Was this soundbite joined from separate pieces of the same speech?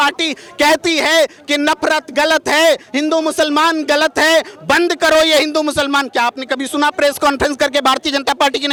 no; 0 cuts

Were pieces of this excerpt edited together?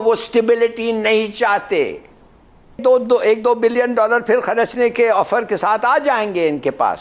yes; 1 cut; at 2.8 s

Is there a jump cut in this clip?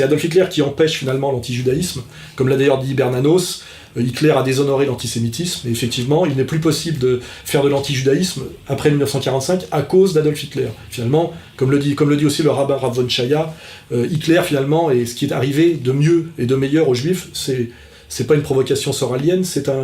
yes; 1 cut; at 11.8 s

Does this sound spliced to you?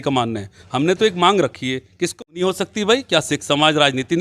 yes; 1 cut; at 2.1 s

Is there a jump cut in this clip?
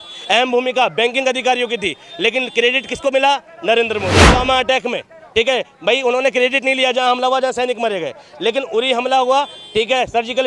yes; 1 cut; at 4.3 s

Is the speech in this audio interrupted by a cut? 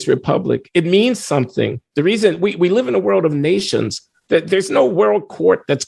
no; 0 cuts

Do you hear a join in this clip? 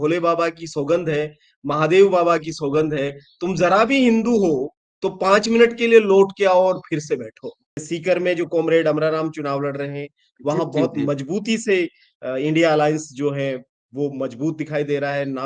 yes; 1 cut; at 7.8 s

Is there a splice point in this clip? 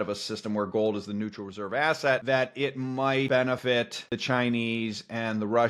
yes; 2 cuts; at 2.2 s, 3.6 s

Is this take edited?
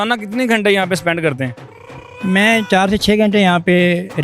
no; 0 cuts

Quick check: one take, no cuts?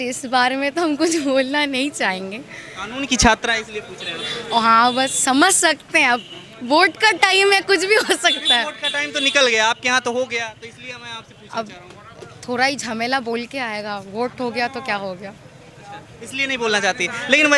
yes; 0 cuts

